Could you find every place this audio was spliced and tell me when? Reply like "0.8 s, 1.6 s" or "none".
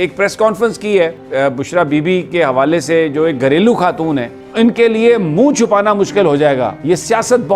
4.4 s